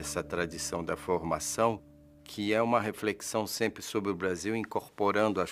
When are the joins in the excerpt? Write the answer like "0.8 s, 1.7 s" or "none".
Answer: 4.4 s